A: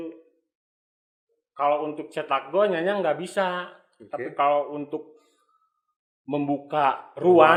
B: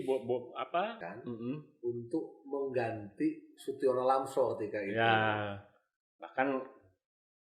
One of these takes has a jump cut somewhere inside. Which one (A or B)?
B